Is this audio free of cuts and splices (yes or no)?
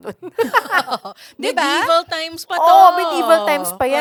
yes